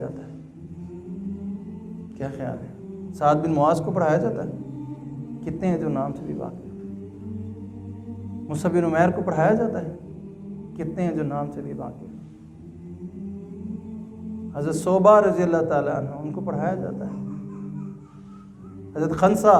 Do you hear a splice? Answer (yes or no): no